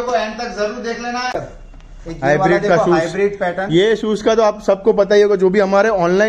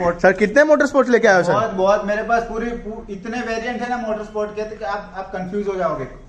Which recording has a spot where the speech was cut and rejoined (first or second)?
first